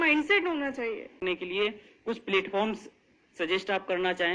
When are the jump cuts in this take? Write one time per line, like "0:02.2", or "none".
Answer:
0:01.2